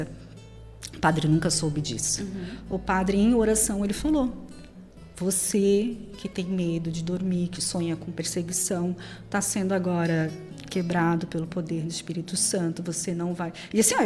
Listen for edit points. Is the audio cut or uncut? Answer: uncut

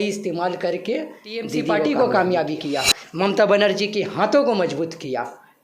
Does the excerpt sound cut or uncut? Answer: cut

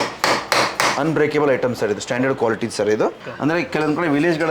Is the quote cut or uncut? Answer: cut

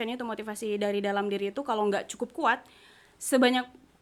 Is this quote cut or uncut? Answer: uncut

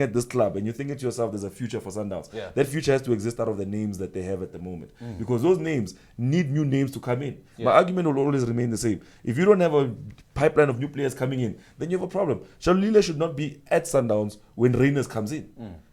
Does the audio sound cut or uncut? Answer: uncut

